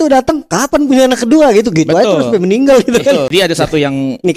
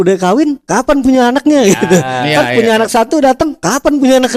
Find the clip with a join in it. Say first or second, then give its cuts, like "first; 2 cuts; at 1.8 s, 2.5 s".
first; 1 cut; at 3.3 s